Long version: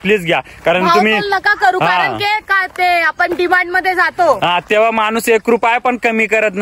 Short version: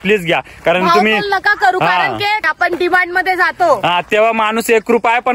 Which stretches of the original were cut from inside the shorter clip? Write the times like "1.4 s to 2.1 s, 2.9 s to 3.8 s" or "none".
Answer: 2.5 s to 3.1 s